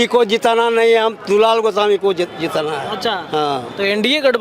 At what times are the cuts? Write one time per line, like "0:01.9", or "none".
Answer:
none